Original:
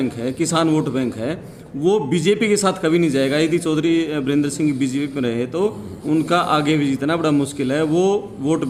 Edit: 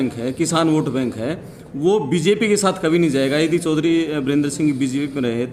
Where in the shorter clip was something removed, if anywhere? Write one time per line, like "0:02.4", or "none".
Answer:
none

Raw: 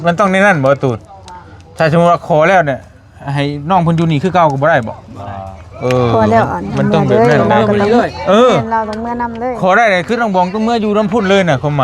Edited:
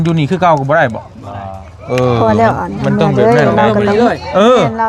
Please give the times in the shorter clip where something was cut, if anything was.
none

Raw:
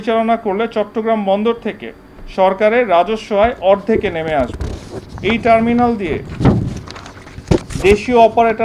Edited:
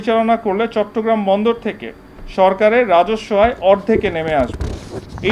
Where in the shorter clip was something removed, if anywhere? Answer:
none

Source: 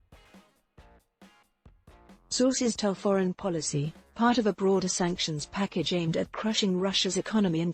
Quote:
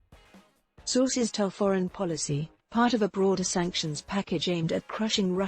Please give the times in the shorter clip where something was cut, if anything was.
0:00.9

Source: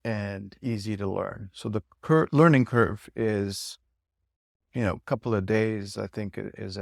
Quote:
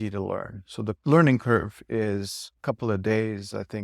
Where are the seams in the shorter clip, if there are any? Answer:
0:01.0
0:02.6

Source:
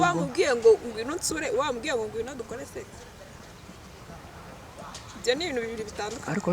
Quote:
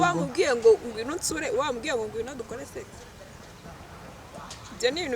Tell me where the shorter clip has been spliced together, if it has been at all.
0:03.6

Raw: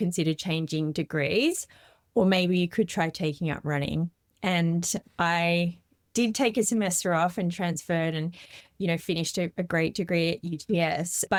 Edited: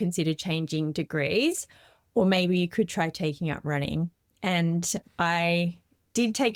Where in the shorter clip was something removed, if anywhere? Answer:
none

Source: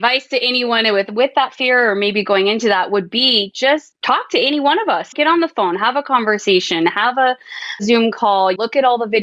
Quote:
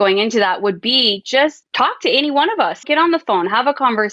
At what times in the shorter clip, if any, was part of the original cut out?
none

